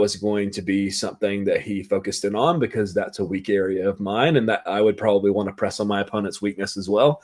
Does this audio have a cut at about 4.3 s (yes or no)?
no